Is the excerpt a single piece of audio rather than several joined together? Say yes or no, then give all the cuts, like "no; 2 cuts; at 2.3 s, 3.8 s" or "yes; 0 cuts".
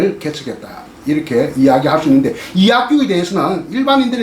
yes; 0 cuts